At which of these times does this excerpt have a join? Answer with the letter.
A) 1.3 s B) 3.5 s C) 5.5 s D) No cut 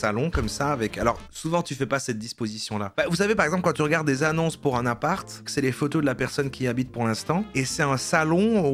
C